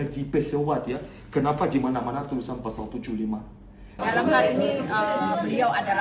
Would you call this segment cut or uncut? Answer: cut